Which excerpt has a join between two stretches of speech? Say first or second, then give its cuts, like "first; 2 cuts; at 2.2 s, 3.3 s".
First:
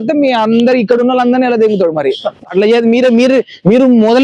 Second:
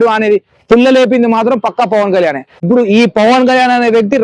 second; 1 cut; at 2.5 s